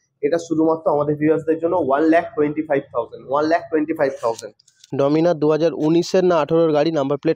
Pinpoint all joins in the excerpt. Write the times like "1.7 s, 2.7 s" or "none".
4.8 s